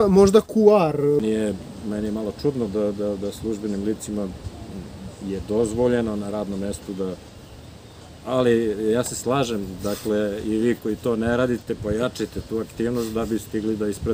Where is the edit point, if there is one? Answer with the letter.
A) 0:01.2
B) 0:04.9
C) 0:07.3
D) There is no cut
A